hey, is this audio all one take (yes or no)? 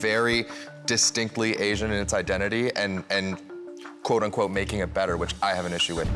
yes